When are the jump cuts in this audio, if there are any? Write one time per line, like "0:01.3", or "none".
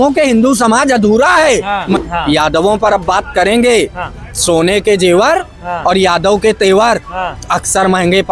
0:01.9